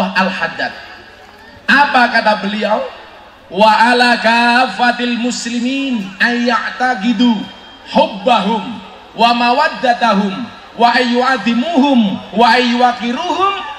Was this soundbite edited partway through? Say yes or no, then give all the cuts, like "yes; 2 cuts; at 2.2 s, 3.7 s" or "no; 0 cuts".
no; 0 cuts